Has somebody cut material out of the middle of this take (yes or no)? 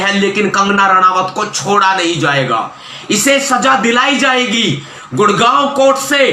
no